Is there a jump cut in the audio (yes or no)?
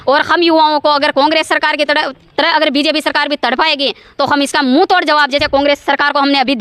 no